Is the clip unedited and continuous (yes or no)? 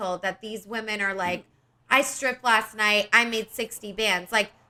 yes